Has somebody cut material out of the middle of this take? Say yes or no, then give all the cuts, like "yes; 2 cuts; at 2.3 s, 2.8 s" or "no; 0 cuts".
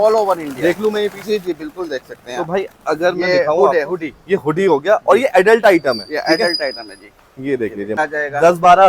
yes; 1 cut; at 8.0 s